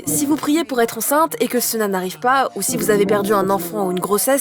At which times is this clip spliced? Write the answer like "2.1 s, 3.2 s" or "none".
none